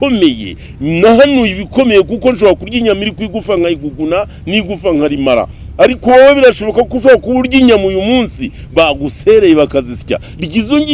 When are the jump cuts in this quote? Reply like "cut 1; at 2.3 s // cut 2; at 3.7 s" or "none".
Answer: none